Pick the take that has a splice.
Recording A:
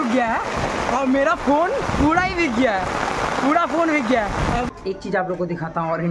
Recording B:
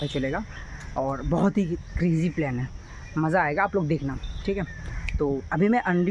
A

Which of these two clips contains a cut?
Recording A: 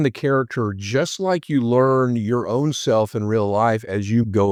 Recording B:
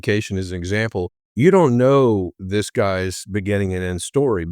B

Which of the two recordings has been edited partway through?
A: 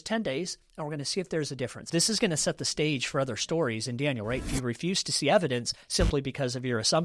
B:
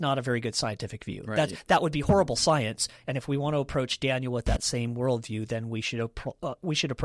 A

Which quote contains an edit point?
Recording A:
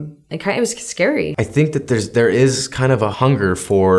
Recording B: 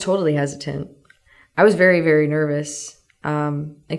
A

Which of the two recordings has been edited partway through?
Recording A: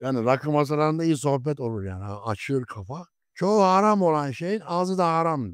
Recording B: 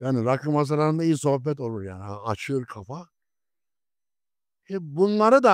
A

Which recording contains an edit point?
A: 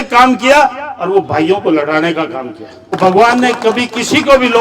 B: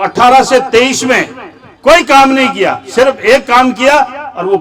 A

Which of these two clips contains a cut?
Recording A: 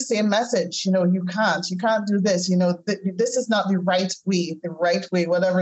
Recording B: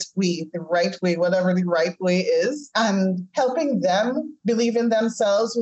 B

